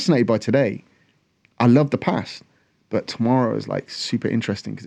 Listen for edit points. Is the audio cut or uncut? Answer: uncut